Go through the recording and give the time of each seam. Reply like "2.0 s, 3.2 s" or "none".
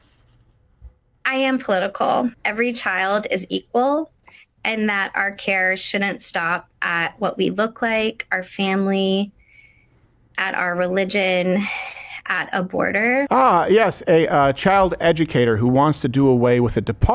2.4 s, 13.3 s